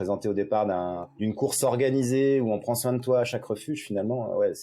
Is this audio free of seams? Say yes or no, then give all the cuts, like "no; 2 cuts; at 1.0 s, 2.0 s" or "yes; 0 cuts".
no; 1 cut; at 1.1 s